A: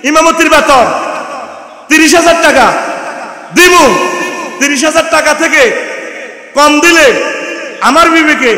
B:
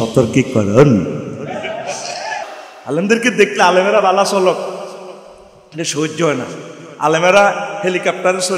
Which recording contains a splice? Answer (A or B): B